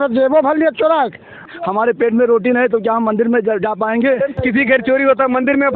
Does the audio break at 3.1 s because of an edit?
no; 2 cuts; at 1.5 s, 4.3 s

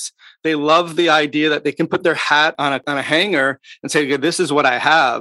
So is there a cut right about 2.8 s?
yes; 1 cut; at 2.8 s

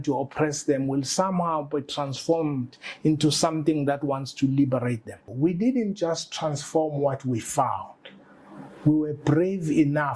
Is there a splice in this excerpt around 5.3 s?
yes; 1 cut; at 5.3 s

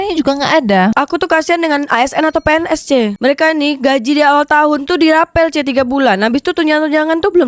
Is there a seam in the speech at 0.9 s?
yes; 2 cuts; at 0.9 s, 3.2 s

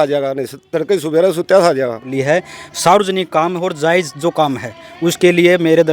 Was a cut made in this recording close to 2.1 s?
yes; 1 cut; at 2.1 s

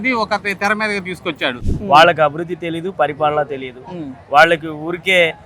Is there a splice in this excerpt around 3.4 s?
no; 1 cut; at 1.6 s

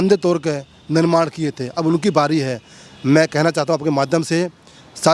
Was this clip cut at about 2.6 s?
no; 0 cuts

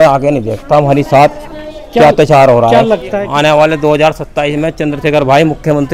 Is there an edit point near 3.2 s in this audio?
yes; 1 cut; at 3.2 s

